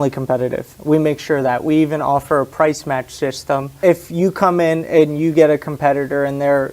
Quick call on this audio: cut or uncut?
cut